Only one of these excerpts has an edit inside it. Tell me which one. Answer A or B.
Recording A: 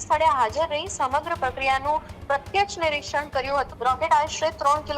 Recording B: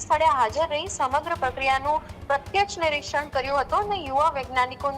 A